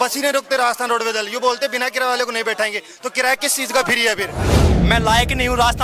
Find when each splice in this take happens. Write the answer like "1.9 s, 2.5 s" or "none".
4.7 s